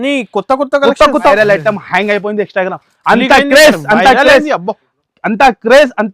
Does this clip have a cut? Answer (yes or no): yes